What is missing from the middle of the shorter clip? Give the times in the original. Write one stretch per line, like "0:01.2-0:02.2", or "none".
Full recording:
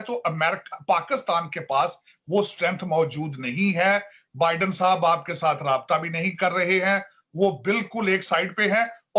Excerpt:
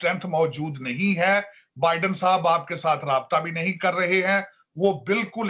none